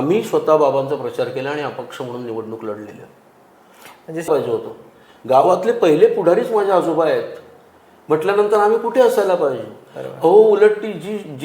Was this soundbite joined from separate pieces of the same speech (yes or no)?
yes